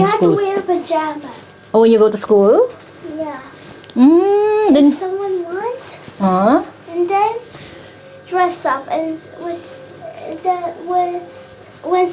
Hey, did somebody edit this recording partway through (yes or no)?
no